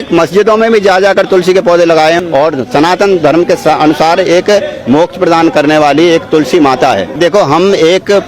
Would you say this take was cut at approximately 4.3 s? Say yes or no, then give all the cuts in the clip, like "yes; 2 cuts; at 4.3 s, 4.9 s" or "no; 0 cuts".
no; 2 cuts; at 2.2 s, 7.2 s